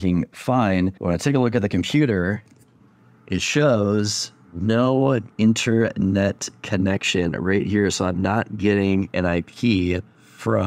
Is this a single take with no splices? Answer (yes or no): yes